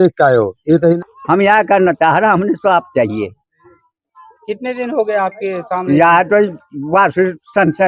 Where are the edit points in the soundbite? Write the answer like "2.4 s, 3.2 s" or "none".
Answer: 1.0 s